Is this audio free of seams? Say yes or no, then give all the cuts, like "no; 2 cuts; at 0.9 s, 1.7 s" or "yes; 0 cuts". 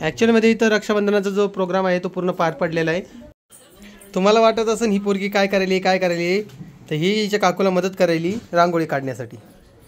no; 1 cut; at 3.2 s